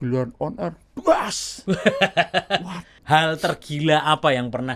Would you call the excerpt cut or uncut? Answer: cut